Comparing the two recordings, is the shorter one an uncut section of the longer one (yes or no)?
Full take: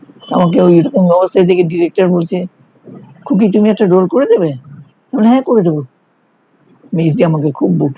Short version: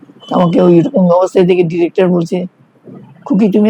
yes